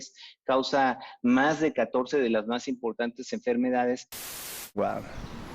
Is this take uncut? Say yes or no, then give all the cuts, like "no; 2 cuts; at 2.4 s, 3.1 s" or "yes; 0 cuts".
no; 1 cut; at 4.2 s